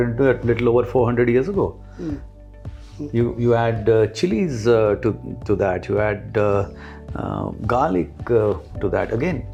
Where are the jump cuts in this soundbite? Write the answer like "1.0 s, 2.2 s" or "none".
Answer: none